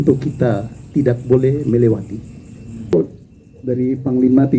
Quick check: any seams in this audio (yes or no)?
yes